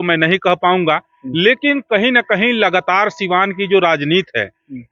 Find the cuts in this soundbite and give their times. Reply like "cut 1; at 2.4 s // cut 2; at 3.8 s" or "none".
none